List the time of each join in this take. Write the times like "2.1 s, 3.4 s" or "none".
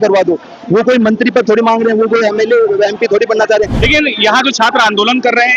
3.8 s